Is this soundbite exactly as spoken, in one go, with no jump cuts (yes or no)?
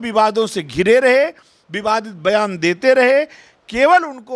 yes